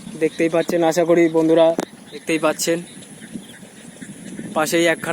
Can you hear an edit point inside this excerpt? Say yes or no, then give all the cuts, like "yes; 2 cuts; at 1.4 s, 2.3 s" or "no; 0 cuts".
yes; 1 cut; at 1.9 s